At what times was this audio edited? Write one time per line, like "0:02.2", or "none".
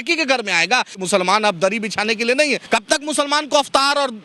0:01.0
0:02.6